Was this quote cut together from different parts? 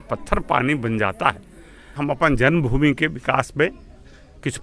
yes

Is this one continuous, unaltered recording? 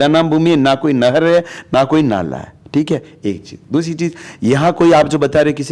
yes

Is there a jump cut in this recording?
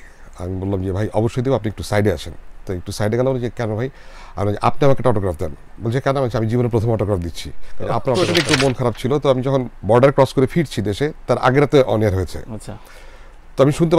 yes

